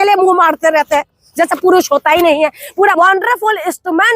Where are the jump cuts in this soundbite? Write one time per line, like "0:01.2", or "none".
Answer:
0:02.9